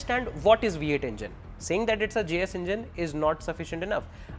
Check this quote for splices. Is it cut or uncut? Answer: uncut